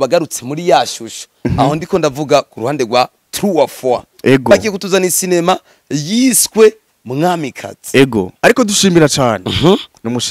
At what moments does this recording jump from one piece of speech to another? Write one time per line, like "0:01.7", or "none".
0:08.3